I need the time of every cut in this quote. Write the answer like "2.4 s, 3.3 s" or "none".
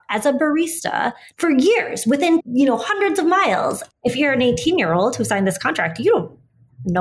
1.3 s, 2.5 s, 3.7 s